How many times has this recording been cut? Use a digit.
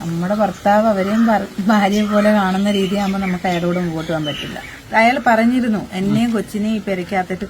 1